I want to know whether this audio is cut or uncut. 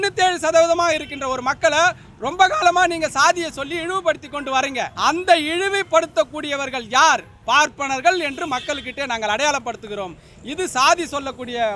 cut